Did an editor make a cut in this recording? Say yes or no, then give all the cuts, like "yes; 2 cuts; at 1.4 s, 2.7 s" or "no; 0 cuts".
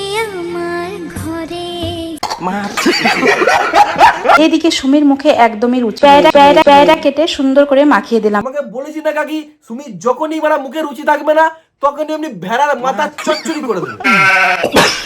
yes; 2 cuts; at 4.4 s, 8.4 s